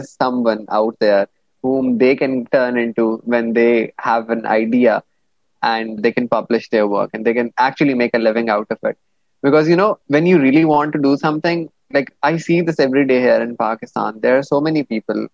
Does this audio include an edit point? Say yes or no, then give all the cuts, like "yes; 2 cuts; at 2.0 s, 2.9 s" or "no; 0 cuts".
yes; 3 cuts; at 2.4 s, 6.0 s, 10.0 s